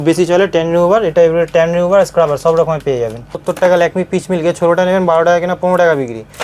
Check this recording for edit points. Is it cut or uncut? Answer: cut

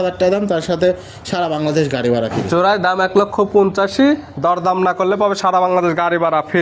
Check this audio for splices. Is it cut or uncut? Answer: uncut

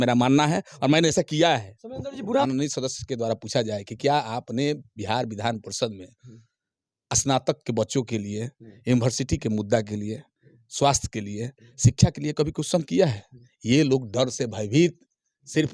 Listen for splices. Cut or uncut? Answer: cut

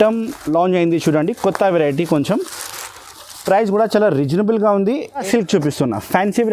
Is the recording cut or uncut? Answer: cut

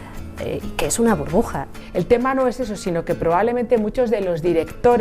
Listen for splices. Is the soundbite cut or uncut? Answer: cut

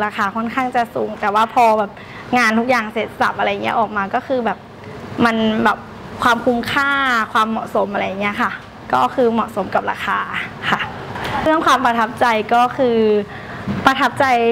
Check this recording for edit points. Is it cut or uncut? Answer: cut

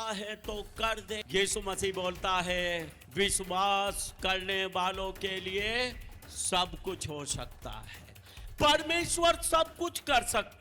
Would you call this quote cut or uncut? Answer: cut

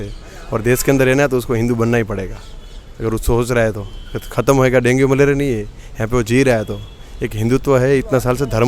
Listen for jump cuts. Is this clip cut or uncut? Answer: uncut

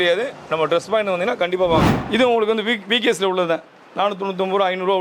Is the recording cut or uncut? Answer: cut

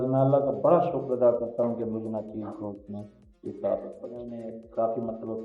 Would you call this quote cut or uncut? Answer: cut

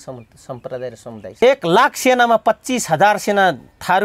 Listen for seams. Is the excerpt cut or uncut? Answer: cut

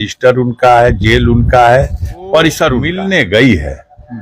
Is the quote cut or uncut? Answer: cut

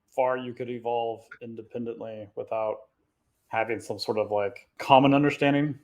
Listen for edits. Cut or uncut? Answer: cut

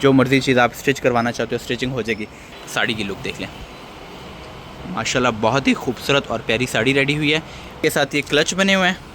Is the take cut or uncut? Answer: cut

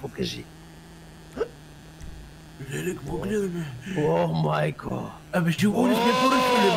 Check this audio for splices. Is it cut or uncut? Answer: uncut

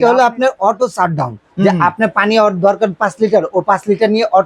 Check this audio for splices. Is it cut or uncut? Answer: uncut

